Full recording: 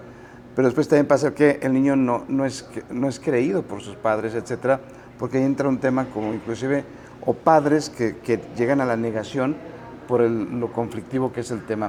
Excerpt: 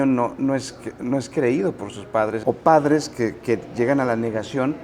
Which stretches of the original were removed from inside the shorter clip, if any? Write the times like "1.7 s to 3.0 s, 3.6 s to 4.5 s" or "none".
4.3 s to 7.2 s

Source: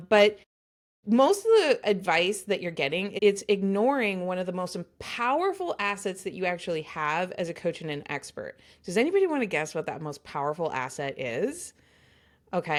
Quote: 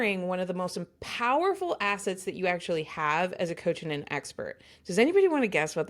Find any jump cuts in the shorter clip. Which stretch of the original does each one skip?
none

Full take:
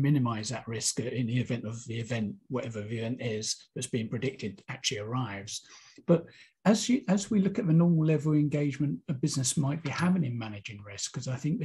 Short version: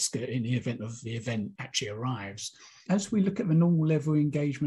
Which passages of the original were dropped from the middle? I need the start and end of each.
2.4 s to 4.7 s, 5.9 s to 7.0 s

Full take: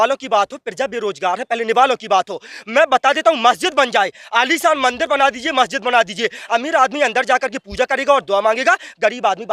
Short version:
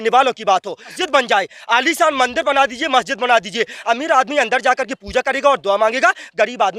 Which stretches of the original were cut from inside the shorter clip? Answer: 2.6 s to 3.6 s

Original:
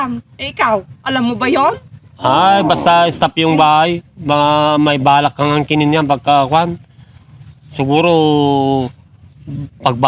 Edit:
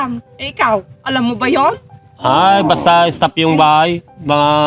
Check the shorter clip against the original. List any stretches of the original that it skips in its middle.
none

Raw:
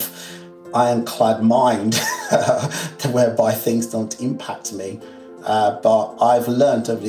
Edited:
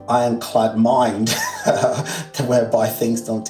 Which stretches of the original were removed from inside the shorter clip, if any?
none

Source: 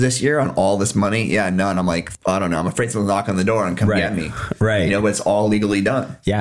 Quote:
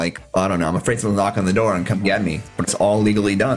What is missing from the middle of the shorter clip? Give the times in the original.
4.6 s to 5.1 s

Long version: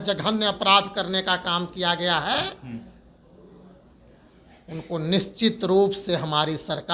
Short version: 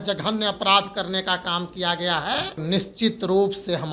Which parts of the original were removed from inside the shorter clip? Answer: 2.6 s to 5.0 s

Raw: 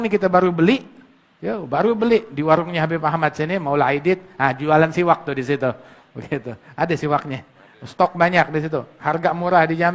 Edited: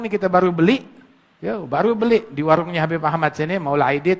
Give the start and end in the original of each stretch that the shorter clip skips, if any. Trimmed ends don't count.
none

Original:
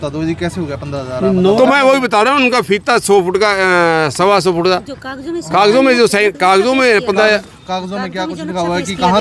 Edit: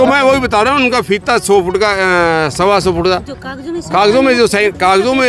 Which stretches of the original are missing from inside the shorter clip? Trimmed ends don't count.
none

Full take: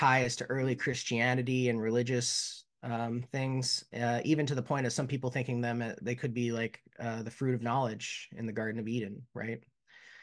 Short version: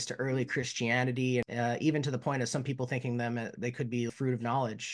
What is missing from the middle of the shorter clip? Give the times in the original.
1.7 s to 3.9 s, 6.5 s to 7.3 s

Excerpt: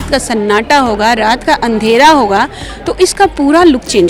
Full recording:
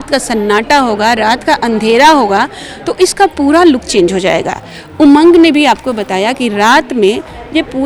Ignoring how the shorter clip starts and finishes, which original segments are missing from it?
none

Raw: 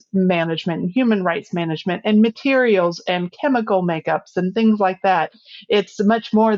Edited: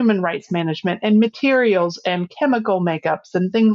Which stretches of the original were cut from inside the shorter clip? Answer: none

